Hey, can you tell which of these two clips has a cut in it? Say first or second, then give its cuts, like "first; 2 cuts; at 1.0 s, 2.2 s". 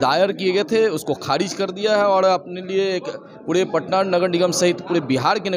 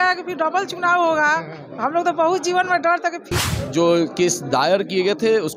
second; 1 cut; at 3.3 s